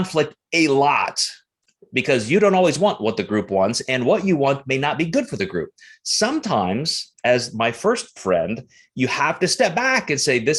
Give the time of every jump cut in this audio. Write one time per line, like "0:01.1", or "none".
none